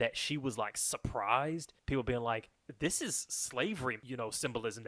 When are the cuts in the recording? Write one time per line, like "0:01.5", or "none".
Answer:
0:01.7
0:02.6
0:04.0